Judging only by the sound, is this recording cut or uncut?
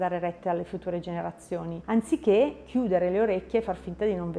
cut